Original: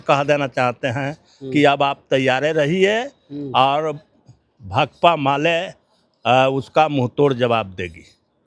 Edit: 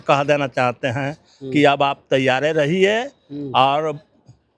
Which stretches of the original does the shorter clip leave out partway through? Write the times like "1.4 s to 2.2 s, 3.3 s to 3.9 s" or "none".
none